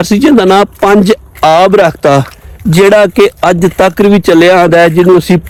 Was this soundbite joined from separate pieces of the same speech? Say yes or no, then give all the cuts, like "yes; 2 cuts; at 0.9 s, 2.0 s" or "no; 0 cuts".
no; 0 cuts